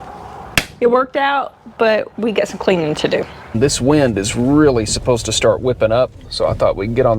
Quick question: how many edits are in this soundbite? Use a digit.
2